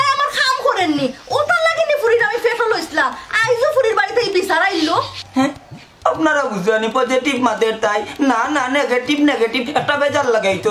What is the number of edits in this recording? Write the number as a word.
zero